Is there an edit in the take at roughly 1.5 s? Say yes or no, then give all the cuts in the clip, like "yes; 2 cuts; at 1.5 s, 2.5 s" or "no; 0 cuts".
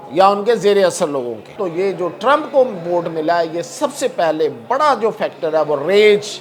yes; 1 cut; at 1.5 s